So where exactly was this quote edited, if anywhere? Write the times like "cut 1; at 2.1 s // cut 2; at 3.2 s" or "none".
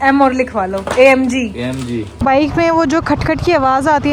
cut 1; at 2.1 s